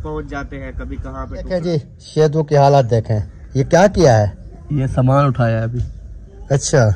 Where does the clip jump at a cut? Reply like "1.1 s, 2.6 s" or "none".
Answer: 1.4 s